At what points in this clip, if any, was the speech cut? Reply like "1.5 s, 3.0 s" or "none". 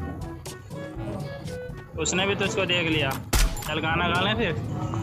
none